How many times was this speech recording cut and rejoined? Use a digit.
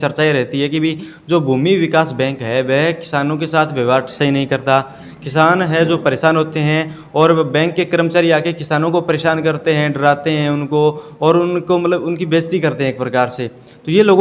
0